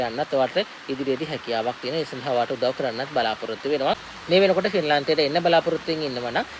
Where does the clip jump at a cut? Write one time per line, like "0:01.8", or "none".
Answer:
0:04.1